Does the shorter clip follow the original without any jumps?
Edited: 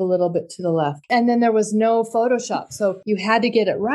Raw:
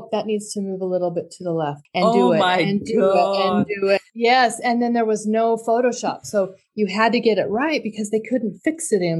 no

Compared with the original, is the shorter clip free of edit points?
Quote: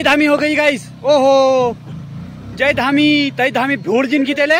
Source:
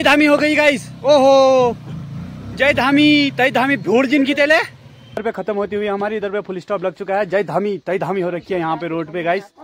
yes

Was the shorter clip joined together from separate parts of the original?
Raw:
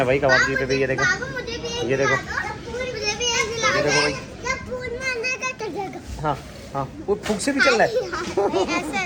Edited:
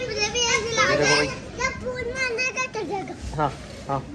no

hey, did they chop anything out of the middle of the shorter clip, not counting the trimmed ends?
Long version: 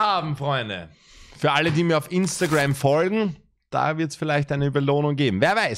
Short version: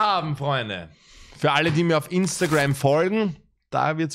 no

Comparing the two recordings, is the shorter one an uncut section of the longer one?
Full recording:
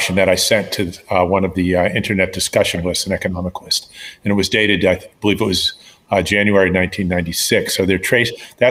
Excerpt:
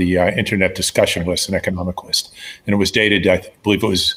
yes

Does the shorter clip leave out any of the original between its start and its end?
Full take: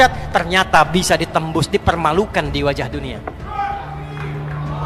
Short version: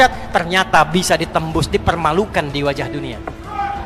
no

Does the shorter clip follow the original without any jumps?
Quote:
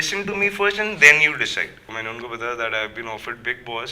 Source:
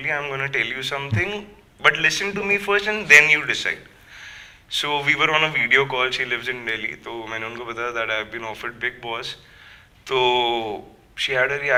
no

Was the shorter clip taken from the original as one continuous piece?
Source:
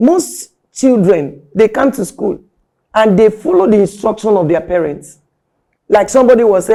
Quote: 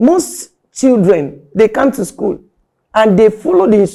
yes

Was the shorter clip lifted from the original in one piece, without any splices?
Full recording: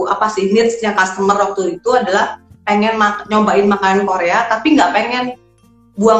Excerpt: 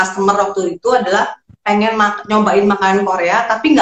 yes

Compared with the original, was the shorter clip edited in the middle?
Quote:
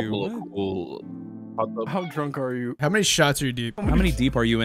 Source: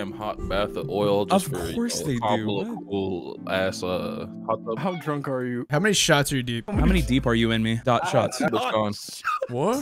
yes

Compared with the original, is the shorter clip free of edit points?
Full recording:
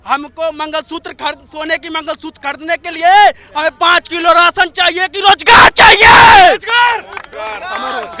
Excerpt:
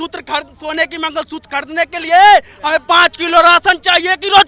yes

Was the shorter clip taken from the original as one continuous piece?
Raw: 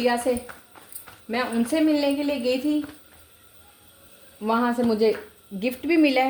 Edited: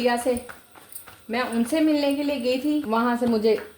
no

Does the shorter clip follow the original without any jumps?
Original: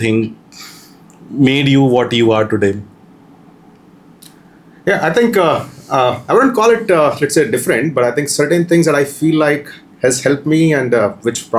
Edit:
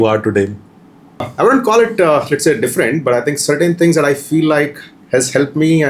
no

